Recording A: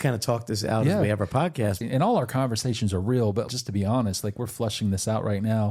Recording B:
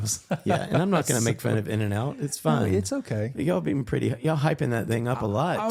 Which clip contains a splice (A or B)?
A